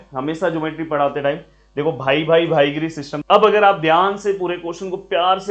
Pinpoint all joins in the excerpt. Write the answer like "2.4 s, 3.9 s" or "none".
3.1 s